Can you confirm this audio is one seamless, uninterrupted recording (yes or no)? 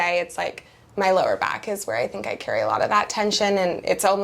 yes